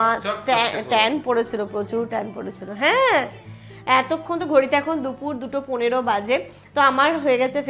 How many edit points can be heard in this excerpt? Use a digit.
0